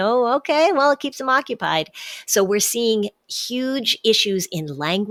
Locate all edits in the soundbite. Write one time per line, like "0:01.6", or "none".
none